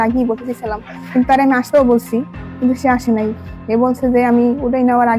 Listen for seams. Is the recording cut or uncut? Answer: uncut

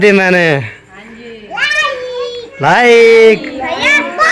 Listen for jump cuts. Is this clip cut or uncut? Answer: cut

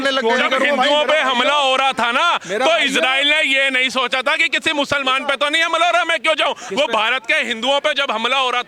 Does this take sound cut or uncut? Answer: uncut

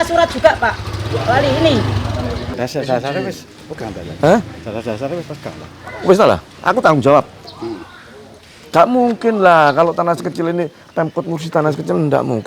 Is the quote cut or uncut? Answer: cut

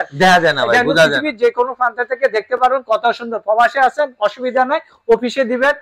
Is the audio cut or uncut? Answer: uncut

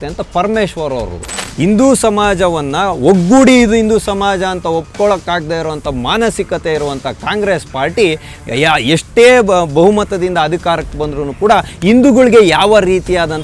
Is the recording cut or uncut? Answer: cut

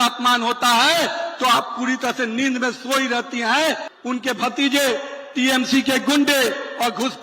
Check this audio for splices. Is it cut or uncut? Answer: cut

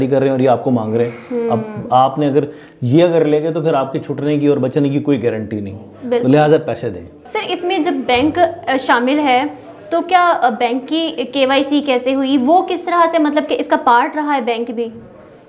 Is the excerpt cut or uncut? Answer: uncut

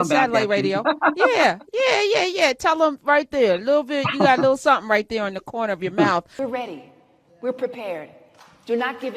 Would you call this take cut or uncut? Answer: cut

